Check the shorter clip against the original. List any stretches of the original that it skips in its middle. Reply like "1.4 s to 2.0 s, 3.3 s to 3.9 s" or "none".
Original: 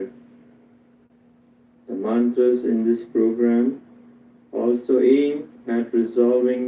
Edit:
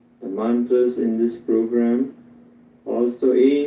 none